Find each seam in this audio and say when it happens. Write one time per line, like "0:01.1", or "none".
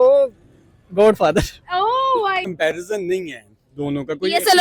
0:02.4